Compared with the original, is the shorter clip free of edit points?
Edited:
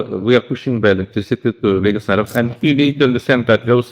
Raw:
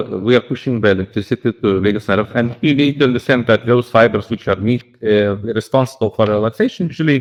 yes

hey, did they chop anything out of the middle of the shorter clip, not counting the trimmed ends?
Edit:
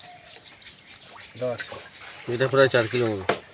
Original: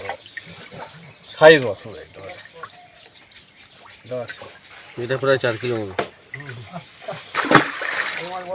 no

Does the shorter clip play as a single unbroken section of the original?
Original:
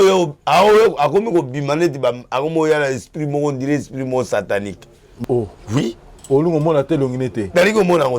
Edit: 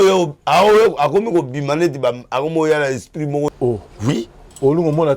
no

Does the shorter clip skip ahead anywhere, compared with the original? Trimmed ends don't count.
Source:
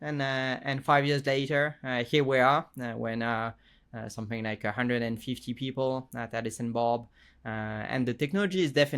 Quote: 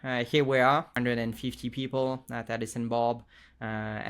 yes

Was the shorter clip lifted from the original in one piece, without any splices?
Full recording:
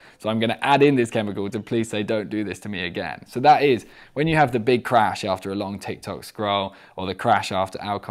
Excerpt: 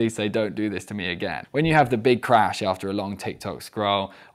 no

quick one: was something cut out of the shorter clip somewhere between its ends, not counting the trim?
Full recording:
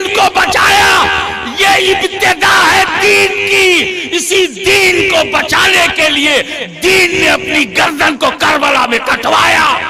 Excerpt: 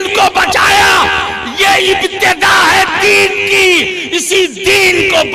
no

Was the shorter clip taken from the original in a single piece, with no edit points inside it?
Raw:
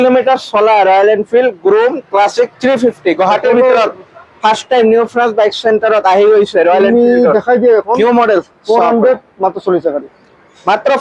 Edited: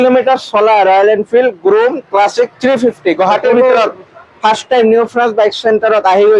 yes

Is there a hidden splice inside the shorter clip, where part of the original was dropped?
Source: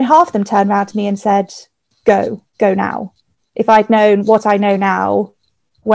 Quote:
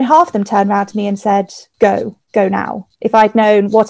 yes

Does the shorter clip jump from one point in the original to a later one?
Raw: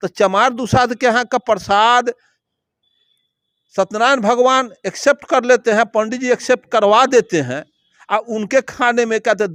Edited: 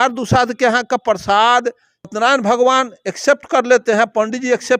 yes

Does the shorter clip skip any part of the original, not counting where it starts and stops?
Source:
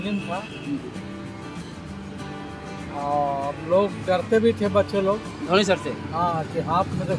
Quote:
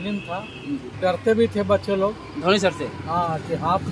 yes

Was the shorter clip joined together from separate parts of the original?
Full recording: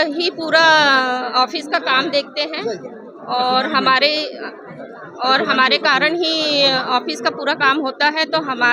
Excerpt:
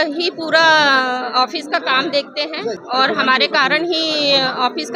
yes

